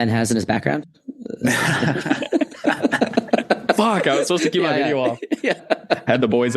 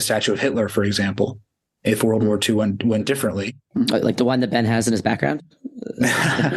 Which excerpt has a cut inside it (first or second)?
first